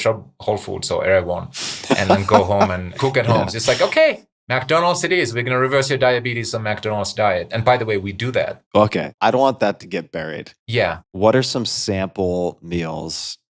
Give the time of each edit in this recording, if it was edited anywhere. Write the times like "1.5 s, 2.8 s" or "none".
none